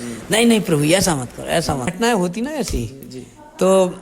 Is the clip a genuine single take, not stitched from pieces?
no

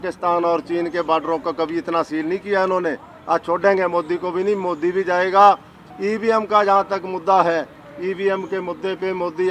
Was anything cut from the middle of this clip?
yes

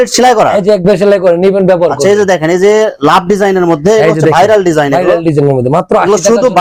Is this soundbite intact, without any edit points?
yes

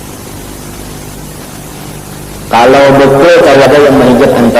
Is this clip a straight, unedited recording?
no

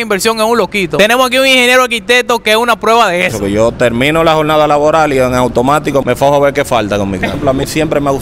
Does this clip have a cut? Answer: yes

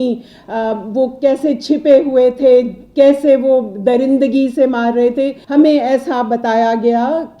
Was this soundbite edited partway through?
yes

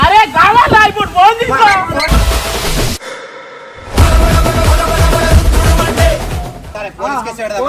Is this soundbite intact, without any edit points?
no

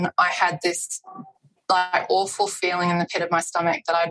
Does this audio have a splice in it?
no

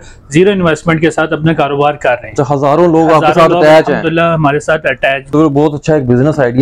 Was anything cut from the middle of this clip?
yes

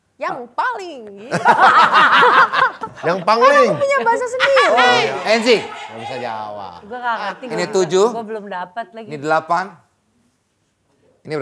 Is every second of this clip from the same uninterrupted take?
no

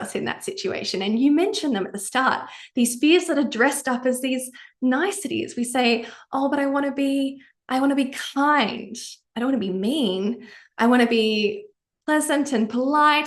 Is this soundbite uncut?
yes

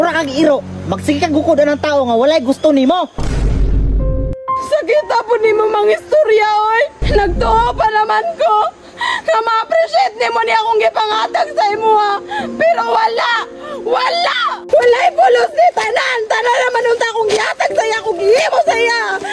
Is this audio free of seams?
no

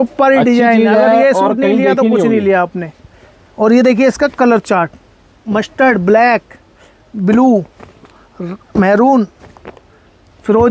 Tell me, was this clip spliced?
no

